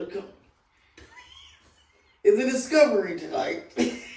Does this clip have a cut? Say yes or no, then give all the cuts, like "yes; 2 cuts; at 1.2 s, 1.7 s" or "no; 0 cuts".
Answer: no; 0 cuts